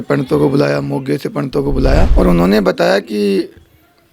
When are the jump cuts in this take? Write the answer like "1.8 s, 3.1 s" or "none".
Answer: 2.1 s